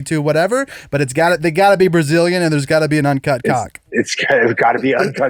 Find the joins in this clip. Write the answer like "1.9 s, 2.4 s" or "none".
3.8 s